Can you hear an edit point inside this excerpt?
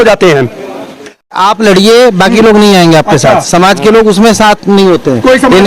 yes; 1 cut; at 1.3 s

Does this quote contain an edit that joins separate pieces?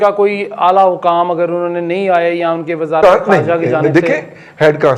no; 0 cuts

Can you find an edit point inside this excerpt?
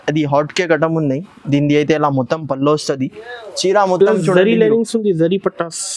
no; 0 cuts

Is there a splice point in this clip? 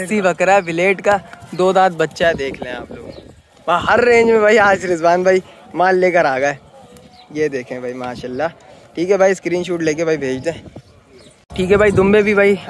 no; 0 cuts

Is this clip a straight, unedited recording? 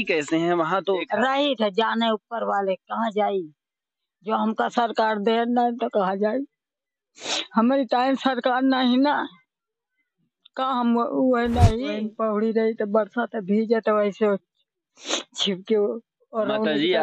no; 2 cuts; at 1.1 s, 11.9 s

